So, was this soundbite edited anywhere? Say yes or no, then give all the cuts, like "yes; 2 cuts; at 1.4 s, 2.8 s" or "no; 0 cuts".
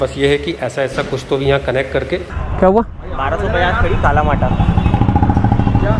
yes; 1 cut; at 2.4 s